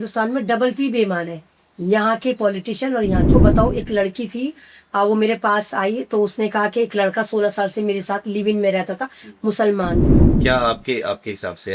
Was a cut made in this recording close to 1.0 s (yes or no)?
no